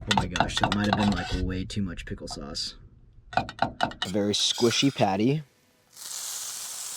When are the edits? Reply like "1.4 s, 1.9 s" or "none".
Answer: 4.0 s